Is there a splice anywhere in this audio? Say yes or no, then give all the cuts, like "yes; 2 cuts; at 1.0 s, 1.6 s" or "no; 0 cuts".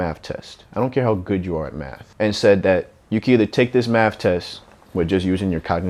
no; 0 cuts